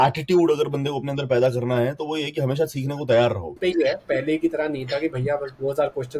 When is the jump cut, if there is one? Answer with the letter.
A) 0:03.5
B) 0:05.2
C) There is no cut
A